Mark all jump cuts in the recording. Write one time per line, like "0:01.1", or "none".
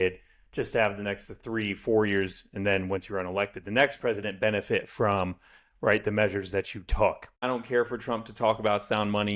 0:07.3